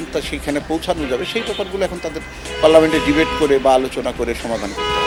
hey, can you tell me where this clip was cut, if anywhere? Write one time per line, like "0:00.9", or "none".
none